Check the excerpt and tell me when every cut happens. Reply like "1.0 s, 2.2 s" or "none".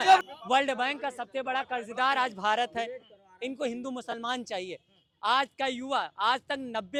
none